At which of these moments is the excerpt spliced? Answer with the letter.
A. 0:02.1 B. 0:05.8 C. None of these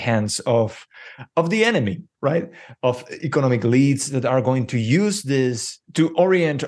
B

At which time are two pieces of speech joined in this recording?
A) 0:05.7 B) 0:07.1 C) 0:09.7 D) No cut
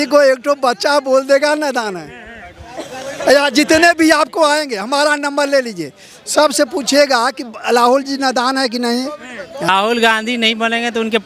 D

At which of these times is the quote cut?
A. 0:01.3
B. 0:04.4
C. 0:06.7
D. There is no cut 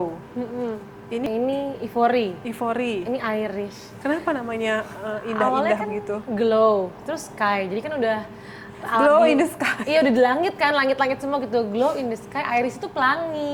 A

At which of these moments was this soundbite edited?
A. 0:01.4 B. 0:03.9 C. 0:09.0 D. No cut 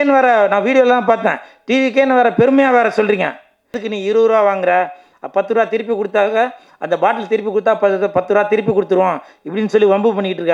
B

